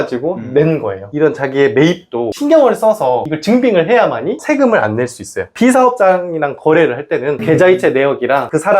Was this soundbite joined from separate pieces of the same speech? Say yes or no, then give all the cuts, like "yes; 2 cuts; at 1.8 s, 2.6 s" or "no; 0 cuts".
yes; 2 cuts; at 1.0 s, 5.5 s